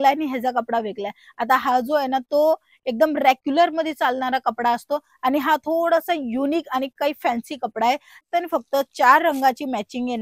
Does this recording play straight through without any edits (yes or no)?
no